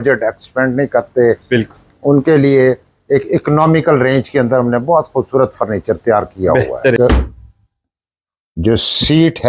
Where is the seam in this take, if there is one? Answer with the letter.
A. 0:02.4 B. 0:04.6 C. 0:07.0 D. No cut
C